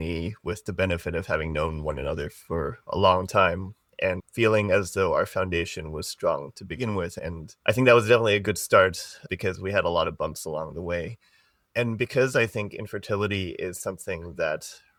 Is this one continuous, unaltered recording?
yes; 0 cuts

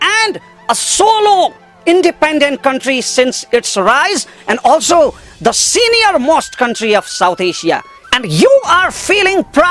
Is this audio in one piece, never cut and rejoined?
no; 1 cut; at 7.9 s

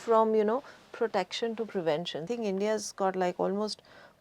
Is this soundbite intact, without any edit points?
no; 1 cut; at 2.3 s

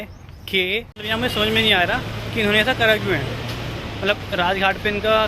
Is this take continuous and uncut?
no; 1 cut; at 1.0 s

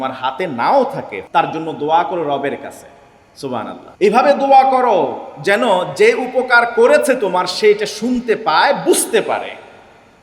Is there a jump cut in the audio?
yes; 2 cuts; at 1.1 s, 3.8 s

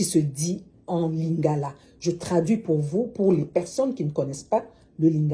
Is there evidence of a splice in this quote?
no; 0 cuts

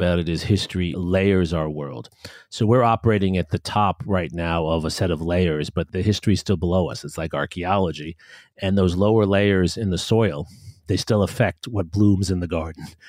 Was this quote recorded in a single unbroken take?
no; 2 cuts; at 0.9 s, 5.9 s

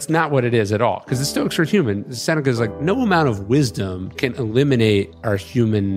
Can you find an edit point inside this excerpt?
yes; 2 cuts; at 4.1 s, 5.2 s

